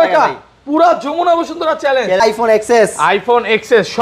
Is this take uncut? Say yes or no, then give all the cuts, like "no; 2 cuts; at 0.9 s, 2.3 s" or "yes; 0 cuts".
no; 1 cut; at 2.2 s